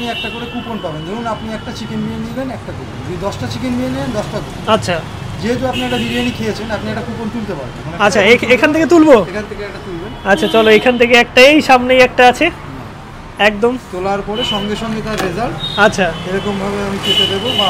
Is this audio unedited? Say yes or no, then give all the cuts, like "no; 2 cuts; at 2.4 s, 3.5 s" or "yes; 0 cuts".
yes; 0 cuts